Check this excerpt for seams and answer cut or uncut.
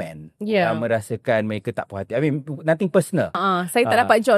cut